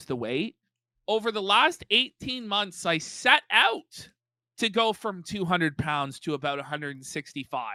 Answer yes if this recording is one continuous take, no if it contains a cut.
yes